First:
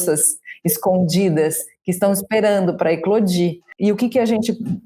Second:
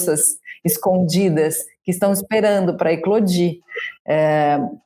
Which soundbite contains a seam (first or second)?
first